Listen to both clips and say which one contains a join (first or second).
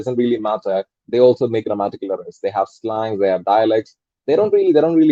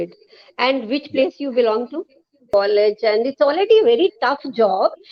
second